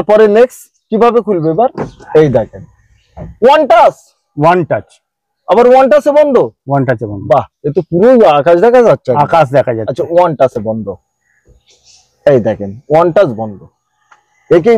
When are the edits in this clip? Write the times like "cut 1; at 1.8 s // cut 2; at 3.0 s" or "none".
none